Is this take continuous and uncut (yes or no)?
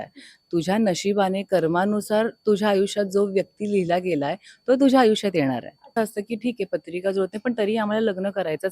no